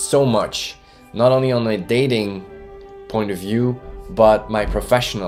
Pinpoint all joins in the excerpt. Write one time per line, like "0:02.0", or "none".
none